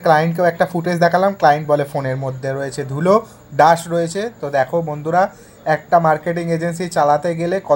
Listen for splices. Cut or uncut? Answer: uncut